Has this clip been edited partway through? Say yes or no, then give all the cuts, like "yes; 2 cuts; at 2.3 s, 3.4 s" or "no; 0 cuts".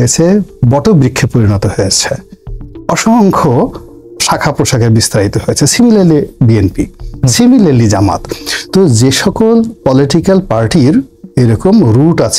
no; 0 cuts